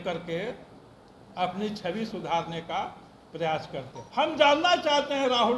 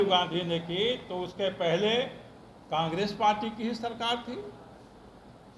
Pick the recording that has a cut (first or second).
first